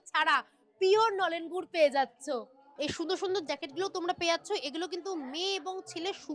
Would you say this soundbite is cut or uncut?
cut